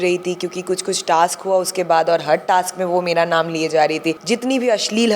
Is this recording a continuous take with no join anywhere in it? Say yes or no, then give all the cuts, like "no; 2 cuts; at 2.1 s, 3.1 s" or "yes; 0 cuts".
no; 1 cut; at 4.2 s